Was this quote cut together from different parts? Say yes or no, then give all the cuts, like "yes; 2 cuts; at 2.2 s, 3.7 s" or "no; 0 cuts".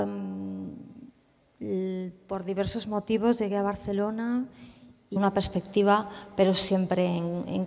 no; 0 cuts